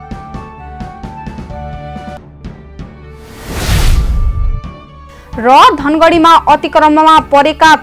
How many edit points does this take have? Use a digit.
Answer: 1